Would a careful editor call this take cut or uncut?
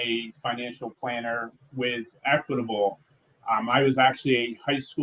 uncut